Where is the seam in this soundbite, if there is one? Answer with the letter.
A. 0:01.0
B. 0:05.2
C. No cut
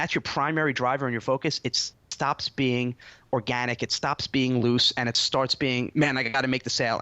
B